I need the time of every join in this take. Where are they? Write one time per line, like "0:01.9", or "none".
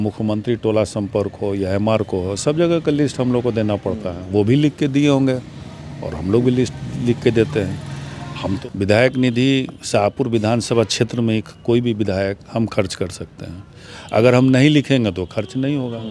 0:08.6